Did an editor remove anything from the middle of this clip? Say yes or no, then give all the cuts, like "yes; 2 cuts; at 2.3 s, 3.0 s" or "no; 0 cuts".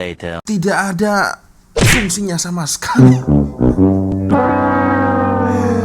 yes; 1 cut; at 3.0 s